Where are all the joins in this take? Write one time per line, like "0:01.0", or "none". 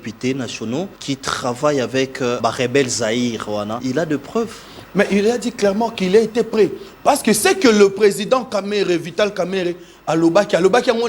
0:01.0
0:02.4
0:03.8